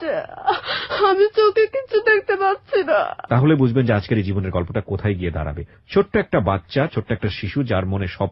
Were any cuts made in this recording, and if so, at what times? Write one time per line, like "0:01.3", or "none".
0:03.2